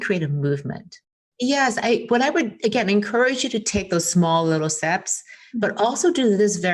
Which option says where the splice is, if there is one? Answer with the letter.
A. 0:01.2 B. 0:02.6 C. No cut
A